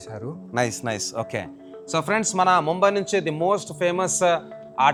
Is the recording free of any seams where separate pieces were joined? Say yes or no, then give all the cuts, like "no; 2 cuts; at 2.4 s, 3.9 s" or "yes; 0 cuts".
yes; 0 cuts